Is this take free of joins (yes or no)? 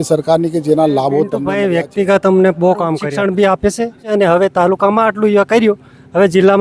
no